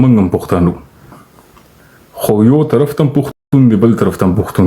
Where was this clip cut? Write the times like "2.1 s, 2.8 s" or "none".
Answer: 3.4 s